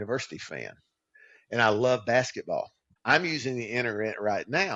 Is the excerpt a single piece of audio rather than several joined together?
no; 1 cut; at 2.9 s

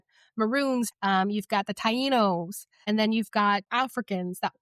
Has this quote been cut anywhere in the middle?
yes; 2 cuts; at 0.9 s, 2.7 s

